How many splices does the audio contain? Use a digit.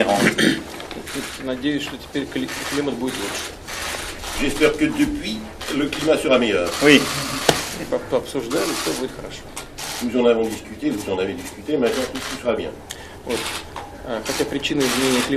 0